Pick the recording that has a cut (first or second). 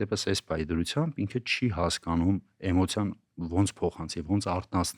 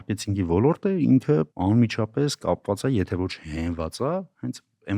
second